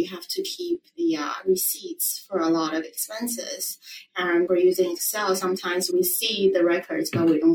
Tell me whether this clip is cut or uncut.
cut